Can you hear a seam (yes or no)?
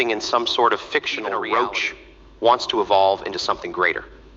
yes